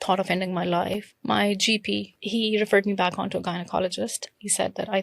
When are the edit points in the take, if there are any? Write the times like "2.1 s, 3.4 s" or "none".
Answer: 1.1 s, 2.3 s